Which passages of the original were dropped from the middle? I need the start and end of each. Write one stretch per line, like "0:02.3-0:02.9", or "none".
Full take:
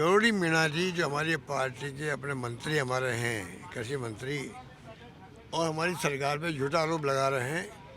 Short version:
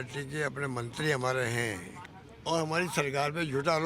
0:03.6-0:05.0